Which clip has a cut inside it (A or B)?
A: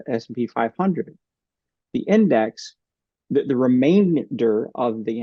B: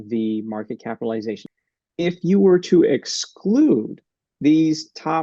B